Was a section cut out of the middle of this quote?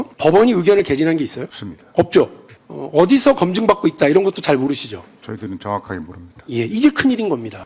no; 0 cuts

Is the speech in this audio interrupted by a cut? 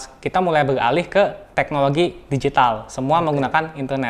yes; 1 cut; at 1.4 s

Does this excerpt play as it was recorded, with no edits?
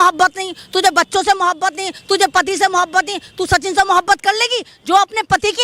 yes; 0 cuts

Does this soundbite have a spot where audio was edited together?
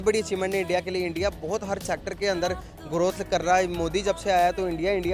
no; 0 cuts

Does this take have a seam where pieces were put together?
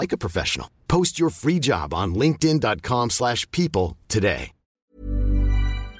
yes; 1 cut; at 4.9 s

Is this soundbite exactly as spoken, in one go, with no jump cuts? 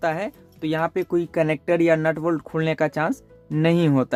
yes; 0 cuts

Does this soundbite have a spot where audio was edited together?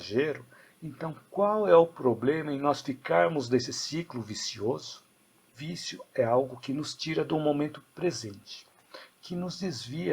yes; 1 cut; at 5.5 s

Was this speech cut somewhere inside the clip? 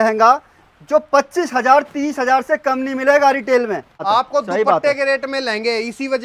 yes; 1 cut; at 4.0 s

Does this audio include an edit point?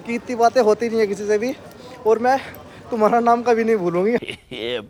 no; 0 cuts

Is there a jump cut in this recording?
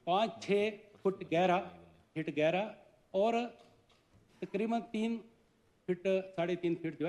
no; 0 cuts

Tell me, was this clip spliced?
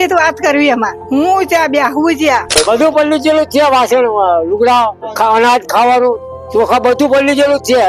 yes; 2 cuts; at 1.0 s, 2.6 s

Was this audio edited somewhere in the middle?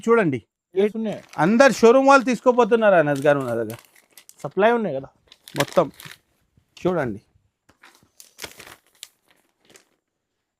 yes; 1 cut; at 0.9 s

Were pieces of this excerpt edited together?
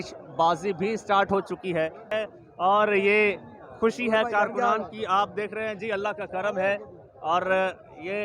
yes; 1 cut; at 2.0 s

